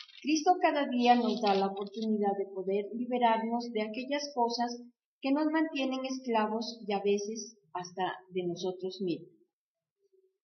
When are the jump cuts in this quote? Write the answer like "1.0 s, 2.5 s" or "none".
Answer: none